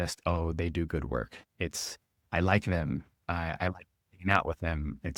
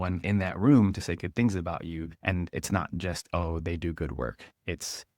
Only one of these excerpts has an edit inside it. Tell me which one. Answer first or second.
second